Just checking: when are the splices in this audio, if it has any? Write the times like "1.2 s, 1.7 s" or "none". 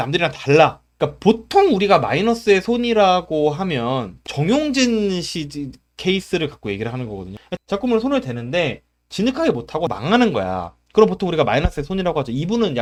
none